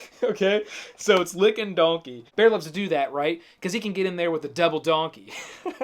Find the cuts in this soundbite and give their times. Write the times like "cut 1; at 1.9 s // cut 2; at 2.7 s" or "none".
cut 1; at 2.2 s